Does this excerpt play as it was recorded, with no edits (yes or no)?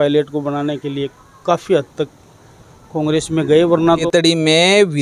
no